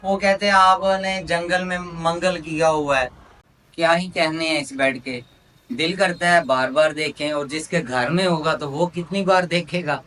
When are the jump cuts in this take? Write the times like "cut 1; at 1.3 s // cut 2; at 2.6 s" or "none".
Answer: cut 1; at 3.3 s